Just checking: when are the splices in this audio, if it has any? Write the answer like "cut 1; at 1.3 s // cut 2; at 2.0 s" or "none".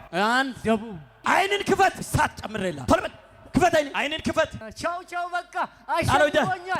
cut 1; at 1.0 s // cut 2; at 2.4 s // cut 3; at 3.9 s // cut 4; at 4.6 s